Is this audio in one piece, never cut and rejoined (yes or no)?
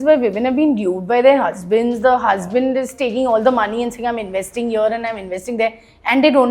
yes